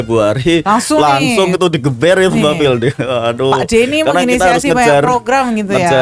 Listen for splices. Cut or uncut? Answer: uncut